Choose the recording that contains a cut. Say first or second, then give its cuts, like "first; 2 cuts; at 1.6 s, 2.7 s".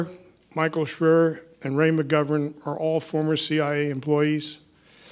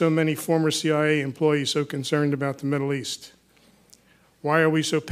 first; 1 cut; at 3.8 s